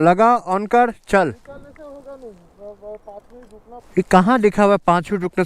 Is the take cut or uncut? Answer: cut